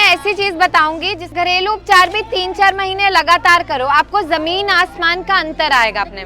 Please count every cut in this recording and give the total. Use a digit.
1